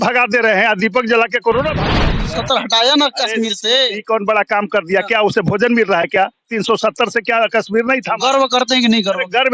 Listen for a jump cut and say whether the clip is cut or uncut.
cut